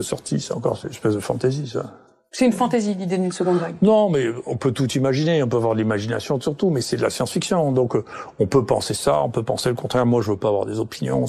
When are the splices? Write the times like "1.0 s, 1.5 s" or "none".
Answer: none